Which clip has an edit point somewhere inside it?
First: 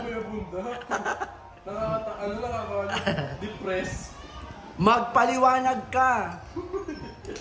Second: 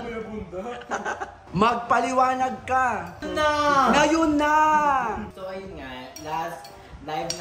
second; 3 cuts; at 1.4 s, 3.2 s, 5.3 s

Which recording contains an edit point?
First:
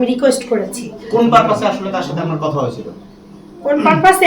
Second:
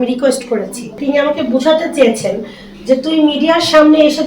second; 1 cut; at 1.0 s

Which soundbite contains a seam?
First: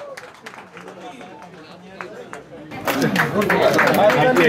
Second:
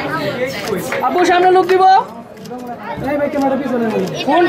first; 1 cut; at 2.7 s

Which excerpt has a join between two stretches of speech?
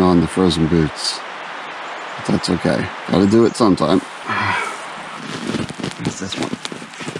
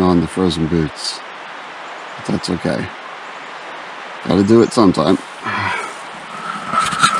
first; 2 cuts; at 3.0 s, 5.1 s

